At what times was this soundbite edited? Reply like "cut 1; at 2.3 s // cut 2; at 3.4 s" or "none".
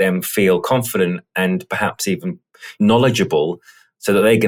none